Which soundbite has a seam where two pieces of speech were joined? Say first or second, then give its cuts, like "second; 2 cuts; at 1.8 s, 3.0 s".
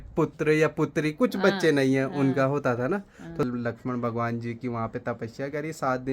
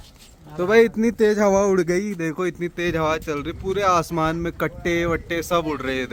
first; 1 cut; at 3.4 s